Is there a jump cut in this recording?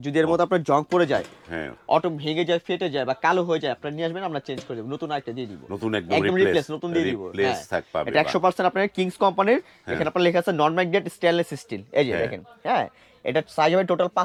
no; 0 cuts

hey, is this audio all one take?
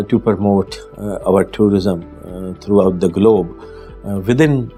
yes; 0 cuts

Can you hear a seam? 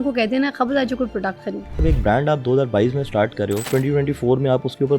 yes; 2 cuts; at 1.7 s, 3.7 s

